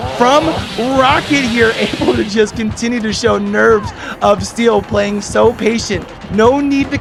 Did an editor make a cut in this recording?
no; 0 cuts

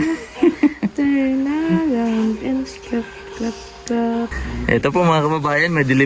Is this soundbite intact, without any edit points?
no; 1 cut; at 4.5 s

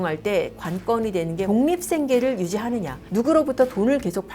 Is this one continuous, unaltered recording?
no; 2 cuts; at 1.5 s, 3.0 s

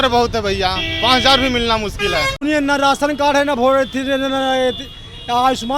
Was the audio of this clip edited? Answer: yes; 1 cut; at 2.4 s

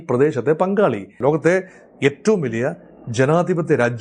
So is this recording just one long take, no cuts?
no; 1 cut; at 1.1 s

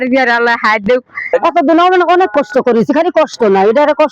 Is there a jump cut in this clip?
yes; 1 cut; at 1.2 s

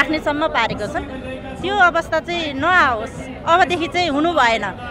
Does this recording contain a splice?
no; 0 cuts

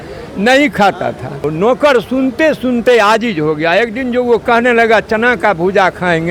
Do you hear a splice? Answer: yes; 1 cut; at 1.5 s

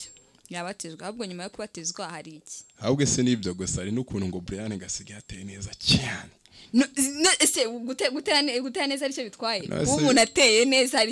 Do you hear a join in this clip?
no; 0 cuts

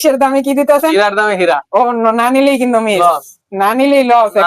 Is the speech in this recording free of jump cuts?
yes; 0 cuts

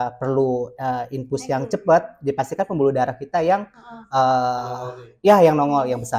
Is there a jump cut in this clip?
no; 0 cuts

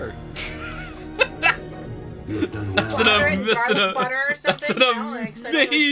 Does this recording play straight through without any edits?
no; 1 cut; at 1.8 s

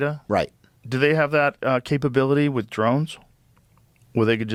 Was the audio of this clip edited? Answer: no; 0 cuts

